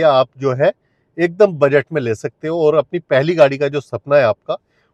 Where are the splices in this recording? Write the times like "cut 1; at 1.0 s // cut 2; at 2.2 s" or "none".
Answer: none